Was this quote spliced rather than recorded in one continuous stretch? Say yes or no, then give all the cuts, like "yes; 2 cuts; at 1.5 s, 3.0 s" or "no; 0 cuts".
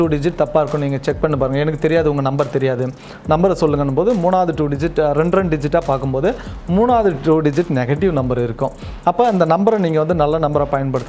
no; 0 cuts